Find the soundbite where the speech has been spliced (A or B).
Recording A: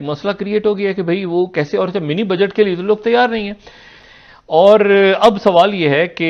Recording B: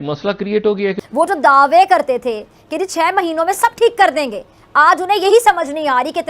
B